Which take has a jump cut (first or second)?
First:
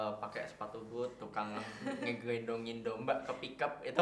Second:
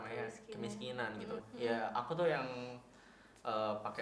second